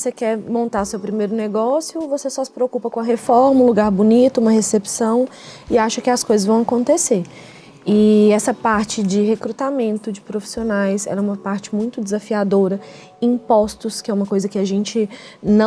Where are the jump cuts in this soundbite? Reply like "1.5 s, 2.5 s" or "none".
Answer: none